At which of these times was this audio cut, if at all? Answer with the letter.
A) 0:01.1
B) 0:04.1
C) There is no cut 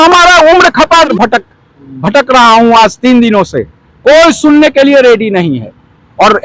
A